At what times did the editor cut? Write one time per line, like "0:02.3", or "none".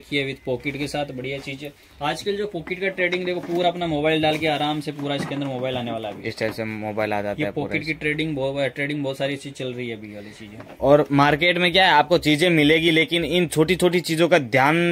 none

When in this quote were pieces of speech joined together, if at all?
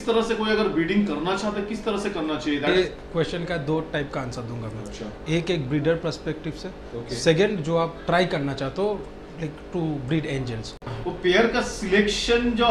0:02.8
0:10.7

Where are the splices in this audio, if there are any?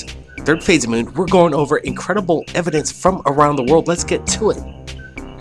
none

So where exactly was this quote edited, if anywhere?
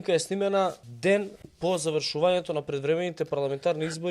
0:00.9
0:01.4

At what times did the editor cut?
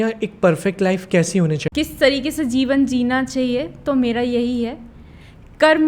0:01.6

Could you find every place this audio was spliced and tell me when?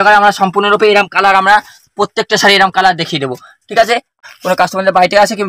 0:04.2

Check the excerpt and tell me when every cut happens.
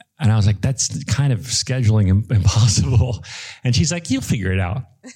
none

